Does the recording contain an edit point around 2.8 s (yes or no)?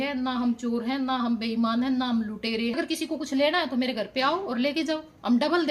yes